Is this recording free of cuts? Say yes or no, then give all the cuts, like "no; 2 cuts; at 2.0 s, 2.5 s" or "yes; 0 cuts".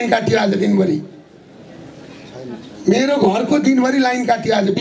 yes; 0 cuts